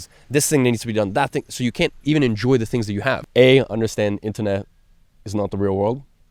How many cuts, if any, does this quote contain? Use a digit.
1